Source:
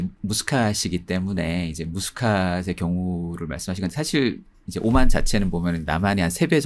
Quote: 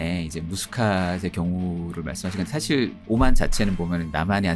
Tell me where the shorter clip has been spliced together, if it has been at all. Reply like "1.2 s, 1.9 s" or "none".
3.0 s